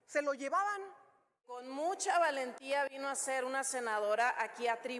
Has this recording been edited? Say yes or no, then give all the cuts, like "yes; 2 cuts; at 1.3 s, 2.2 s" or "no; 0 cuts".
yes; 1 cut; at 1.7 s